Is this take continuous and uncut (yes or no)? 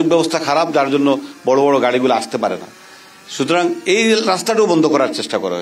yes